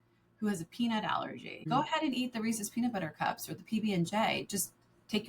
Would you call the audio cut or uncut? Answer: cut